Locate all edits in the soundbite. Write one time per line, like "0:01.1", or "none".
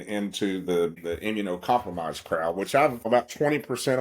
0:01.0
0:03.1